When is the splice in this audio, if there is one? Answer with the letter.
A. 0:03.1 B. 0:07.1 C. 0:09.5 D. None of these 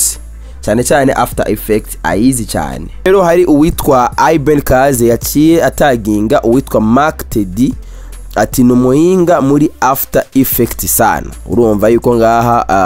A